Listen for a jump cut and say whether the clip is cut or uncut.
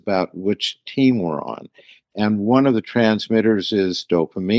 uncut